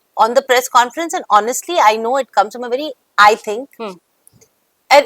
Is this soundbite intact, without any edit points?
yes; 0 cuts

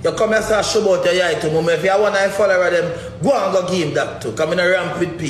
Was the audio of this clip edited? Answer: no; 0 cuts

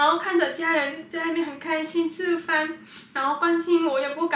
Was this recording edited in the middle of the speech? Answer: no; 0 cuts

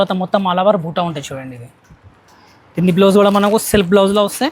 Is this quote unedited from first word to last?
yes; 0 cuts

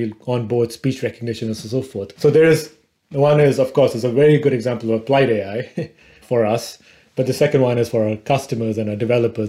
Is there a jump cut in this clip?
yes; 1 cut; at 2.1 s

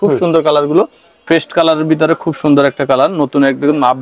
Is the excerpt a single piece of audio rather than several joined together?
no; 1 cut; at 1.2 s

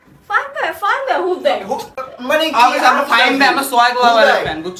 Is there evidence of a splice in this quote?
no; 0 cuts

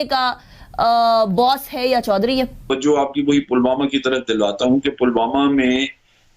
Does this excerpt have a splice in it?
yes; 1 cut; at 2.7 s

